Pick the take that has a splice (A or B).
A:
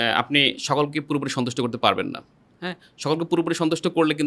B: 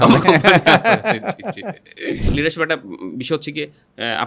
B